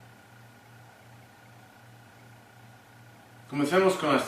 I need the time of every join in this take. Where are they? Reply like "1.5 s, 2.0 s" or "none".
1.6 s